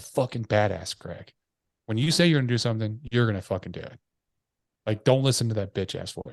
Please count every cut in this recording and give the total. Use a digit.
0